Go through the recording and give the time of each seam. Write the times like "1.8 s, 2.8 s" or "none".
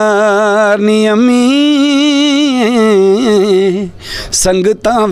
none

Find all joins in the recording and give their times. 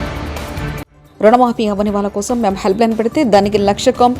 0.9 s

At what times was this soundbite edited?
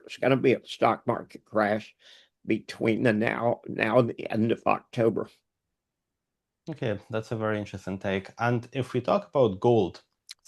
none

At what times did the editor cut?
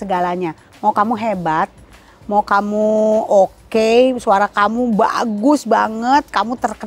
none

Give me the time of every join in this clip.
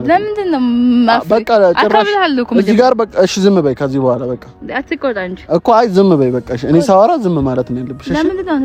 none

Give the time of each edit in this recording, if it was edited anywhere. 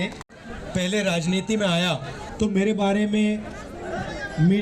2.2 s

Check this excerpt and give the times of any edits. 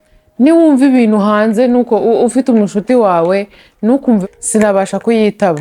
4.2 s

